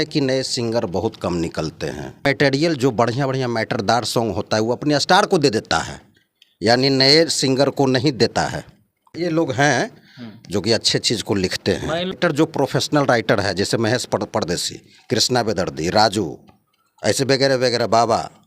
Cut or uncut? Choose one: cut